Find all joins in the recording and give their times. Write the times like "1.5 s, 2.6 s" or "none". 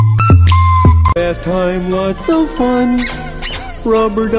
1.1 s